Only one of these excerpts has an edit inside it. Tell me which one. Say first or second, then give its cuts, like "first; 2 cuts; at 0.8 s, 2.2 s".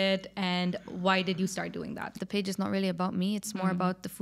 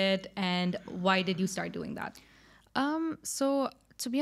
first; 1 cut; at 2.2 s